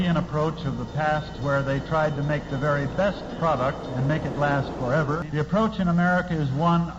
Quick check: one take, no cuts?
no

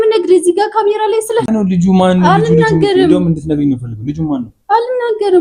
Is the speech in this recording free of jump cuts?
no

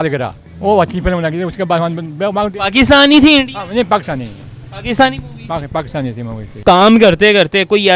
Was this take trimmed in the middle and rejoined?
no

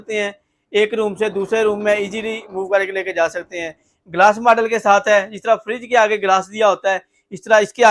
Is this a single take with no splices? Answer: yes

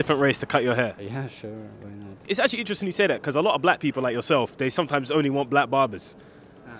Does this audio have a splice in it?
yes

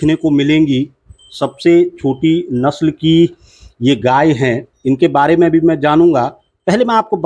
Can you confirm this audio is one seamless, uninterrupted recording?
yes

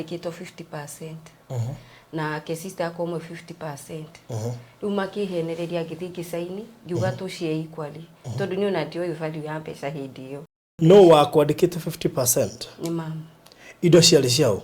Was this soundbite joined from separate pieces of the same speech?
yes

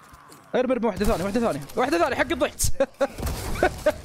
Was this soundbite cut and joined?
no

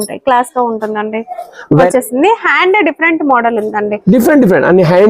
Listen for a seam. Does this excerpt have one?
yes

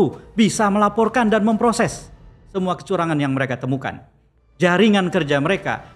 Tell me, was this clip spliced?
no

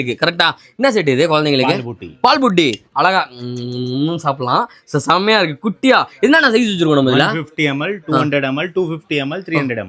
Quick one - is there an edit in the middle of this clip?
no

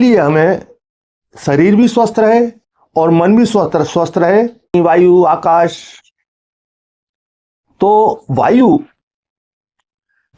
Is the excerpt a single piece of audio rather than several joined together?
no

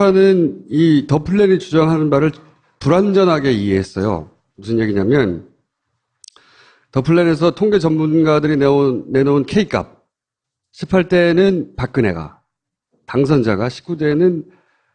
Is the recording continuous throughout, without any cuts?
no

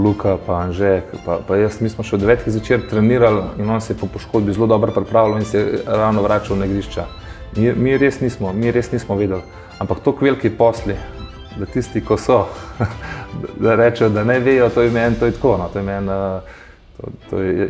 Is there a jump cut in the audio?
no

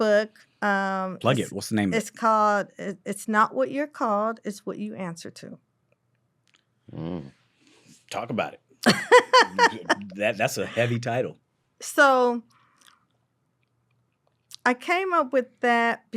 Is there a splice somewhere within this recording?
no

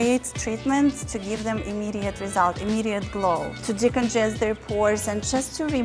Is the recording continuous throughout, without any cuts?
yes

